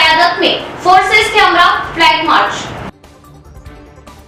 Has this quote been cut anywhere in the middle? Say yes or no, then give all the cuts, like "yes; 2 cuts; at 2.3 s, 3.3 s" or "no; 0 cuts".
no; 0 cuts